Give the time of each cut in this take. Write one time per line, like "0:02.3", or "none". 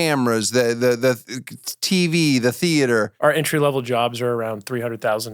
0:03.1